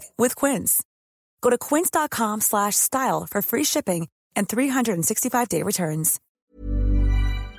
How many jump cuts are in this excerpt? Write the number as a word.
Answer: one